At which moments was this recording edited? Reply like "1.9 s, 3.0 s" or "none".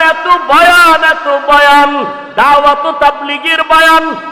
none